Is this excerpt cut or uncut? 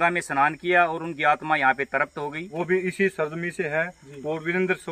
cut